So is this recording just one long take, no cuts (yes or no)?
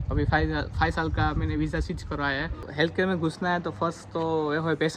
no